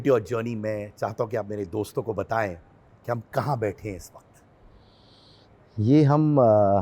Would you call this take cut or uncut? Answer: uncut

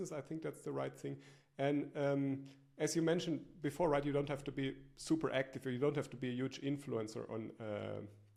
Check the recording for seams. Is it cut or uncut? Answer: uncut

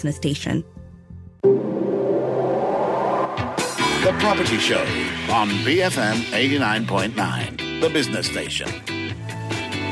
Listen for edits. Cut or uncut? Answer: cut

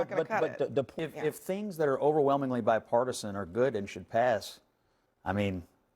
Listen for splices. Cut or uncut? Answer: cut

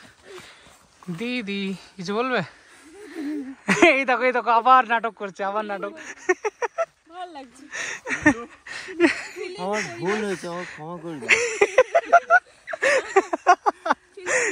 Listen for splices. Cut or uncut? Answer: uncut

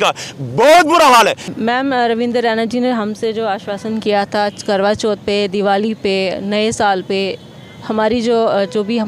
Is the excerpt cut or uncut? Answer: cut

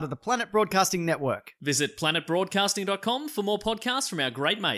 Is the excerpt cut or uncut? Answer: uncut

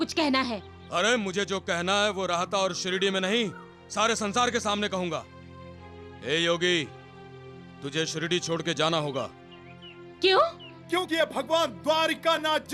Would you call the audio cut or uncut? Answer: uncut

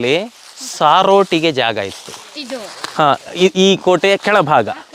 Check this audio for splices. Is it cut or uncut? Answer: uncut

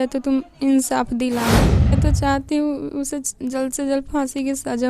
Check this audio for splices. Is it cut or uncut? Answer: cut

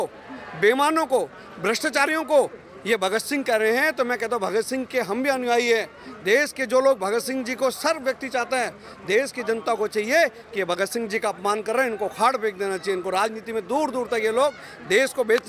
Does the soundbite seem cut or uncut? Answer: uncut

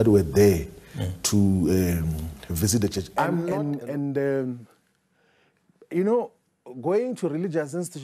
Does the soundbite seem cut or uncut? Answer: cut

